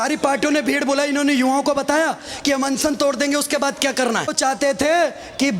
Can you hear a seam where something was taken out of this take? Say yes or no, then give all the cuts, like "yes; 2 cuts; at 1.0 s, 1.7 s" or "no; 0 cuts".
yes; 1 cut; at 4.3 s